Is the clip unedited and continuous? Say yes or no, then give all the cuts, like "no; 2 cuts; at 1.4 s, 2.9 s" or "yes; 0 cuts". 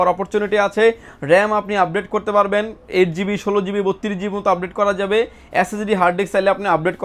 yes; 0 cuts